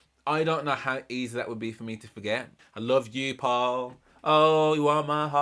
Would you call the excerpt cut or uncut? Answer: cut